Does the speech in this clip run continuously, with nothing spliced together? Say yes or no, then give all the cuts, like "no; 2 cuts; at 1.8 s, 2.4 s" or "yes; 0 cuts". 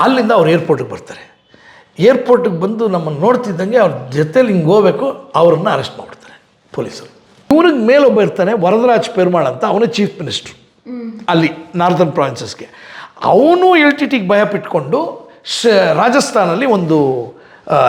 no; 1 cut; at 7.5 s